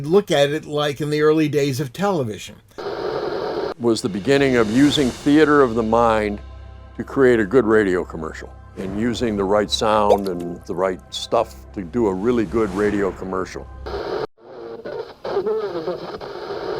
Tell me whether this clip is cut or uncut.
cut